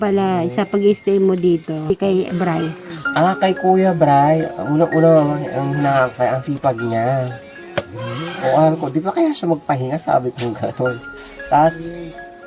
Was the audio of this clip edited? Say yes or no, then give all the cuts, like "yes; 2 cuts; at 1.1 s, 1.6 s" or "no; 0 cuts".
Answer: yes; 1 cut; at 1.9 s